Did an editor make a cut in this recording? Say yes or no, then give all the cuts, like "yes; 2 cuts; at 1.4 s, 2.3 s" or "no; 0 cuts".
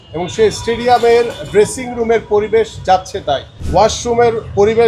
yes; 1 cut; at 3.5 s